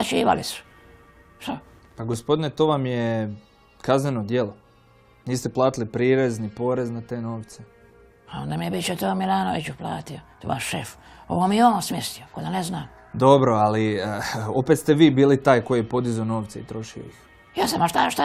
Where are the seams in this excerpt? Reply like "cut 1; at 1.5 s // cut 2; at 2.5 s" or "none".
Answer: cut 1; at 5.5 s